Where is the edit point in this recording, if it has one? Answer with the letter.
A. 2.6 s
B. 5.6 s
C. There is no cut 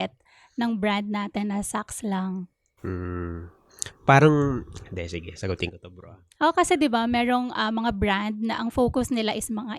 C